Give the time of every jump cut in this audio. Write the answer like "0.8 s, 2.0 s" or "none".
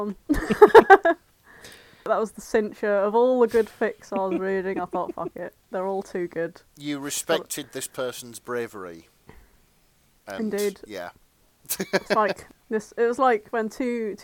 2.1 s, 12.5 s